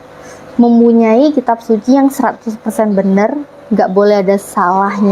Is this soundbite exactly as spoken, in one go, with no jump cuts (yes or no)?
yes